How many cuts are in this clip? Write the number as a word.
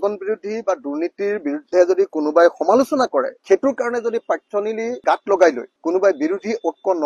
zero